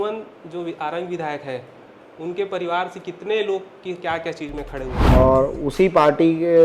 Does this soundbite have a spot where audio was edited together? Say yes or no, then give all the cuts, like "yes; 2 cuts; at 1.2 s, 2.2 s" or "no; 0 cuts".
yes; 1 cut; at 4.9 s